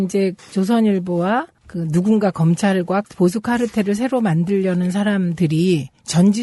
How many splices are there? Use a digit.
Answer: 1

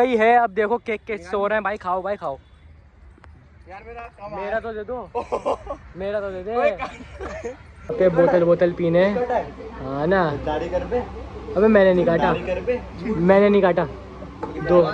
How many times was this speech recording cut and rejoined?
1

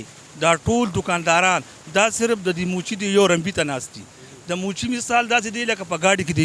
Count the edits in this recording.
0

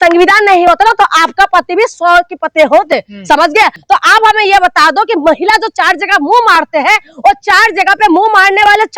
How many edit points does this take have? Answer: 1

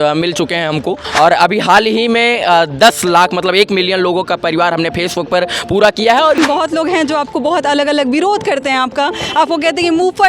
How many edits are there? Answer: 2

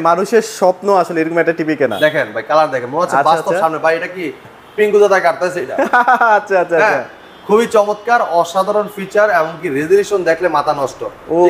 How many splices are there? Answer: 0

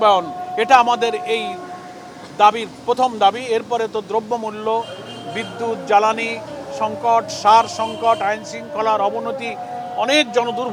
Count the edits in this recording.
0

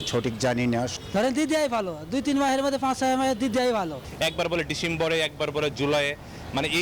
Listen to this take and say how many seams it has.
2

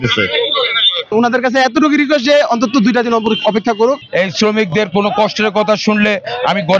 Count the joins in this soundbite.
2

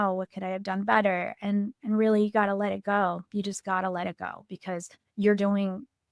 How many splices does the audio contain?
0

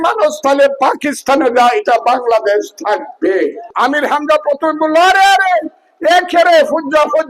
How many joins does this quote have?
1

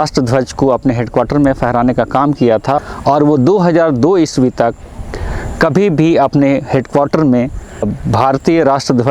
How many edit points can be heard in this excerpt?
2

